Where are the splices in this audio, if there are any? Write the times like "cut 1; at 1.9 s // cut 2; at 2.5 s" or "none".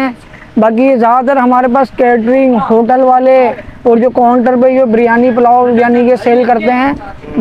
none